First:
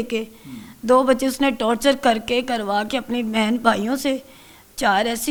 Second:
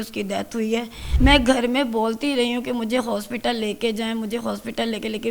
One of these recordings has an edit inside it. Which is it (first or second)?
second